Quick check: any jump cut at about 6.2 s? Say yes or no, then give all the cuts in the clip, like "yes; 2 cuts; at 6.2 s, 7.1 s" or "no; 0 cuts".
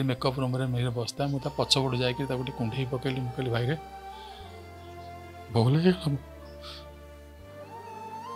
yes; 3 cuts; at 3.8 s, 5.5 s, 6.2 s